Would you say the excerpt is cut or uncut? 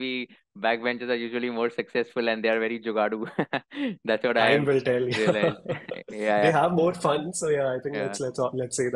uncut